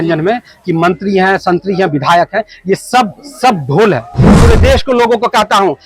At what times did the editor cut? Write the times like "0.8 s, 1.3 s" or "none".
4.2 s

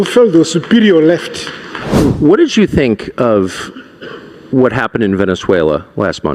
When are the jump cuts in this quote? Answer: 1.9 s

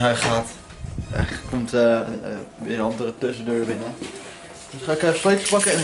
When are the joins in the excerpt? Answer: none

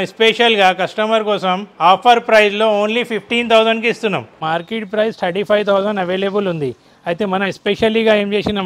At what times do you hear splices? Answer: 4.4 s

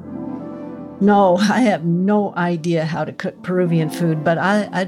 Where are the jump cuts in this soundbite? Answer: 1.0 s

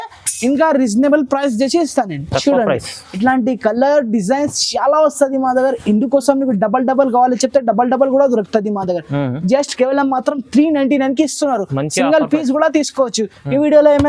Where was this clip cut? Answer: none

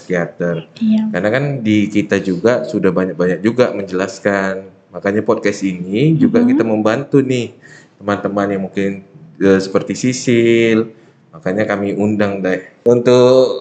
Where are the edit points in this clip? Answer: 12.7 s

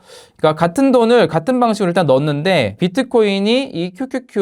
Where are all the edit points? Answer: 2.8 s

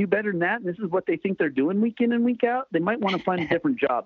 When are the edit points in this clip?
none

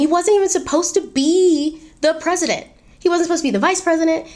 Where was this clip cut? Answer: none

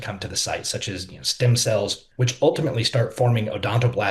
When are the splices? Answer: 2.0 s

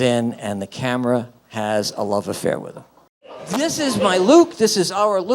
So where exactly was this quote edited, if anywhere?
3.4 s

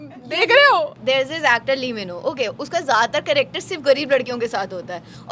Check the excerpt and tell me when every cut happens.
0.9 s

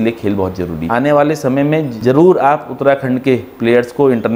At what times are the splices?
0.9 s, 1.9 s

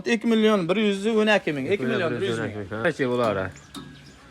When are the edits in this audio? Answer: 2.8 s

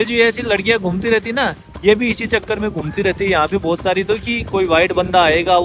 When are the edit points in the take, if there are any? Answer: none

